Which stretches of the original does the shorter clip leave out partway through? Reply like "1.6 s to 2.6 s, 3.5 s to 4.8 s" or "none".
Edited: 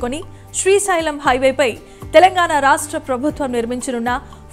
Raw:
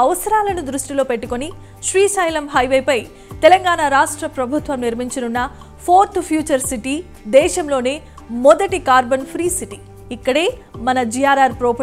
none